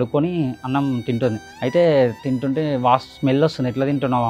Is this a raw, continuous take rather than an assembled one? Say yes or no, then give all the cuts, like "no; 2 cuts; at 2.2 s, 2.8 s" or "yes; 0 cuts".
no; 1 cut; at 1.5 s